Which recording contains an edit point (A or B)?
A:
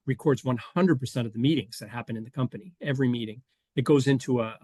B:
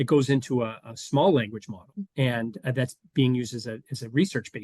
B